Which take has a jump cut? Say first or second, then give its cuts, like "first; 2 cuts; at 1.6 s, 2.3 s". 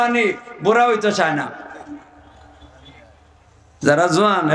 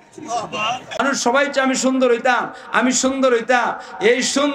second; 1 cut; at 1.0 s